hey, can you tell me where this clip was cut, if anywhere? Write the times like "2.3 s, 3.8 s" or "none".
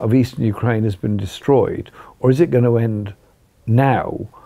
none